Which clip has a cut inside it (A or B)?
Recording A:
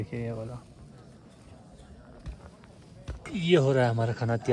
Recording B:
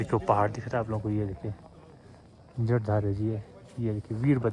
A